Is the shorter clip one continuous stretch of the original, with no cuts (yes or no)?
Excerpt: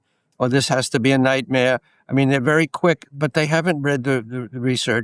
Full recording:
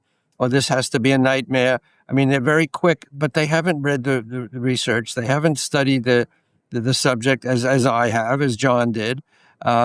yes